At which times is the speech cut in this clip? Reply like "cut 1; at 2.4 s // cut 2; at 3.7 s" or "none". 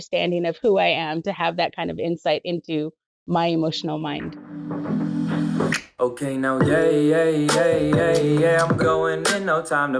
cut 1; at 4.7 s